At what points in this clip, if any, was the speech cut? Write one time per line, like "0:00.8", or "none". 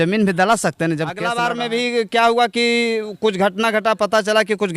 0:01.2